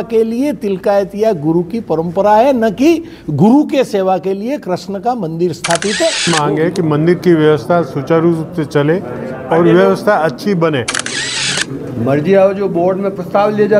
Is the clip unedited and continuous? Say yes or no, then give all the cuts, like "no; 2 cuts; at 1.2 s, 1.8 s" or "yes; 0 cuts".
no; 2 cuts; at 6.2 s, 11.2 s